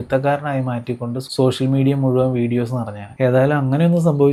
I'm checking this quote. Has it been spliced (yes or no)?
no